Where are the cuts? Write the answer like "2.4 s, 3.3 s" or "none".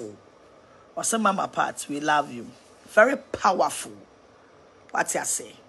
none